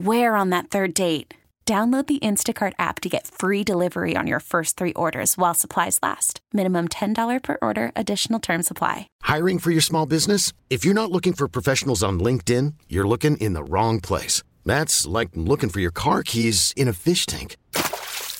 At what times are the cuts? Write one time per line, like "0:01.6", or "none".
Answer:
0:09.1